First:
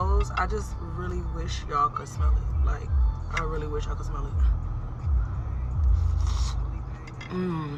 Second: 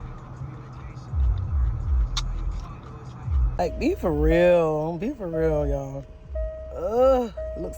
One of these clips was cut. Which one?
second; 1 cut; at 3.5 s

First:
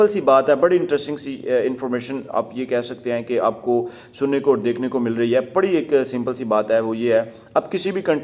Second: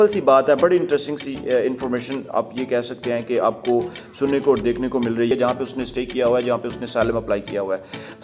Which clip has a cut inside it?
second; 1 cut; at 5.3 s

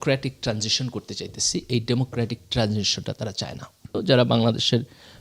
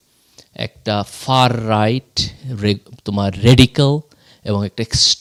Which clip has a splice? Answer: first; 1 cut; at 4.0 s

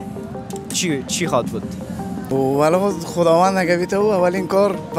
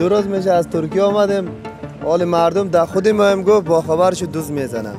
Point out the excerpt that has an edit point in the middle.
first; 1 cut; at 2.2 s

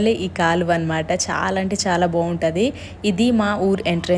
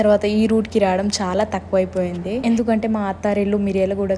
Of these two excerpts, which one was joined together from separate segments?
second; 1 cut; at 2.4 s

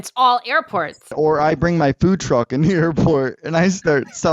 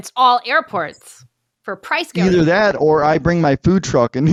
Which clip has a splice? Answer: first; 1 cut; at 1.1 s

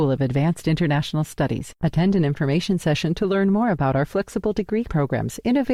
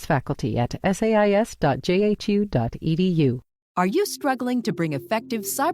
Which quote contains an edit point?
second; 1 cut; at 3.6 s

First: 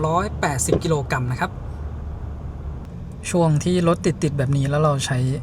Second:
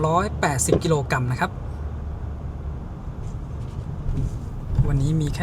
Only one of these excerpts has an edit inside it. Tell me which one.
first; 1 cut; at 2.9 s

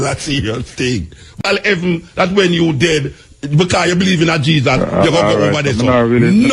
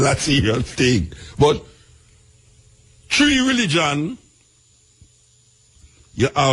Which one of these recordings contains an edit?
first; 1 cut; at 1.4 s

